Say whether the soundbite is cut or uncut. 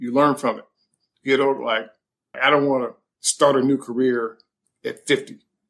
cut